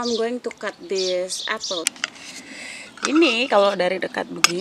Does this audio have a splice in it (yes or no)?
yes